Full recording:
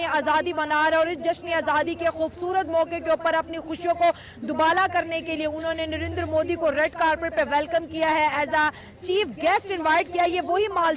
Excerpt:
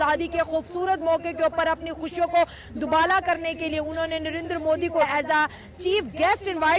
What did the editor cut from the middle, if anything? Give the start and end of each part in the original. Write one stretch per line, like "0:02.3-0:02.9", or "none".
0:06.7-0:08.3